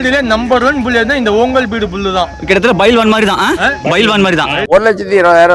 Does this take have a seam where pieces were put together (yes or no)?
yes